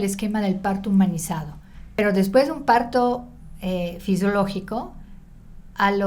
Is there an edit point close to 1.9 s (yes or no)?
yes